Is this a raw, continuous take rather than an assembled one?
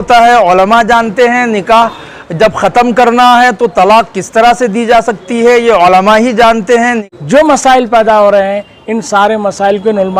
no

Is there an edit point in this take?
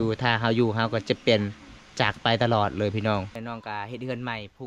yes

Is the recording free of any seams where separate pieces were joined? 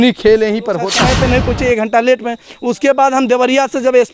no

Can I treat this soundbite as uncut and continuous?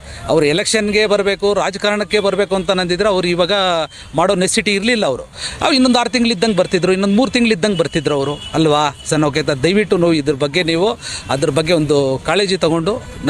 yes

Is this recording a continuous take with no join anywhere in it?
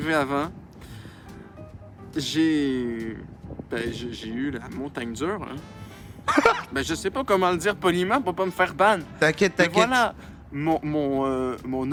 yes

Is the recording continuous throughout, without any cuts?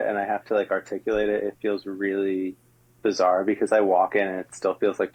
yes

